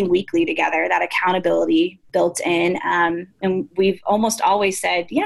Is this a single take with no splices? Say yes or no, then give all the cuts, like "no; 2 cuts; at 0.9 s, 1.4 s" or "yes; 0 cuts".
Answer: yes; 0 cuts